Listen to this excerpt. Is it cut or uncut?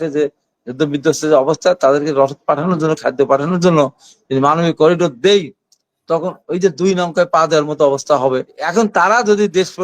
cut